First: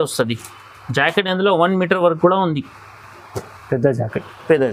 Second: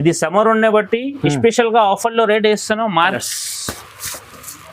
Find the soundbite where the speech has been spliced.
second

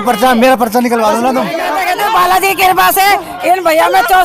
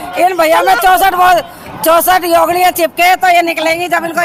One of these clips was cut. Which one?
first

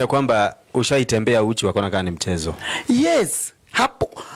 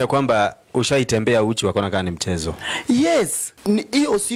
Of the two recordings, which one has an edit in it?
second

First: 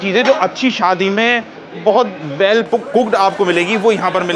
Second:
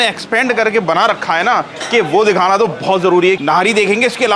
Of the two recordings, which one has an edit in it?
second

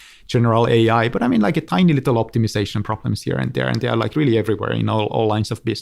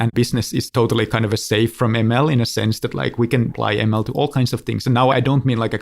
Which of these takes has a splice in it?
second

